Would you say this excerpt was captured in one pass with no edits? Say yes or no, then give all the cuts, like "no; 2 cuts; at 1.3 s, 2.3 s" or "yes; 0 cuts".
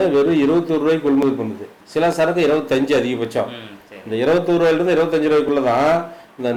yes; 0 cuts